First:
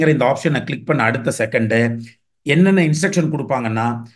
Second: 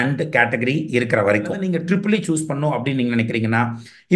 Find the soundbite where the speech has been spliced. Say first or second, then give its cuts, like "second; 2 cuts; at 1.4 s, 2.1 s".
second; 1 cut; at 1.7 s